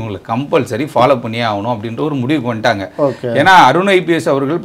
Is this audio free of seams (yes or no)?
yes